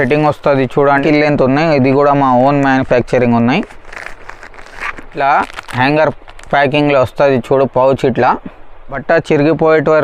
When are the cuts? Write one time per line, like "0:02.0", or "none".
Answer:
0:01.0
0:05.2
0:09.0